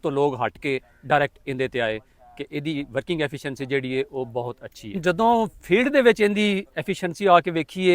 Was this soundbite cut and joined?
yes; 1 cut; at 5.0 s

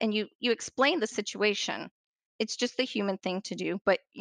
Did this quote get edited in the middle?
yes; 1 cut; at 2.3 s

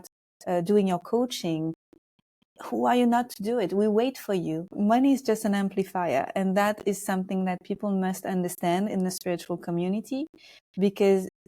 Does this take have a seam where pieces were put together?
yes; 1 cut; at 4.7 s

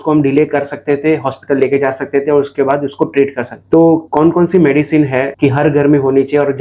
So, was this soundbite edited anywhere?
yes; 1 cut; at 5.3 s

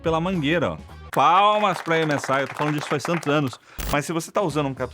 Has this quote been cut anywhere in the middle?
yes; 2 cuts; at 1.0 s, 3.8 s

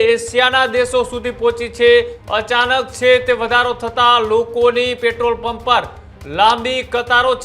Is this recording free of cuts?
no; 1 cut; at 2.2 s

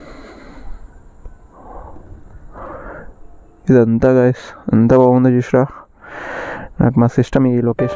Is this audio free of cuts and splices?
yes; 0 cuts

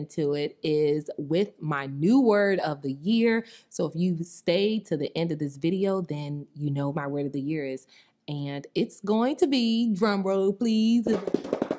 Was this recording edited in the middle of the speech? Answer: no; 0 cuts

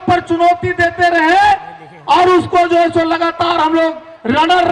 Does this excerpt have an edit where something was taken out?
no; 0 cuts

